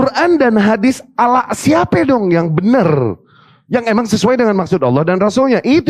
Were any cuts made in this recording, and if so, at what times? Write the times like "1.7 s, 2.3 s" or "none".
none